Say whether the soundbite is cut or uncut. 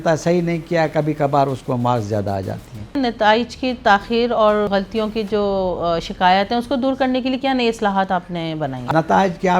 cut